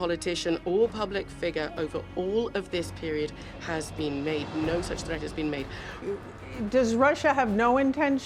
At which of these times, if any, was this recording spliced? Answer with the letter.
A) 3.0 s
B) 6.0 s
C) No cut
B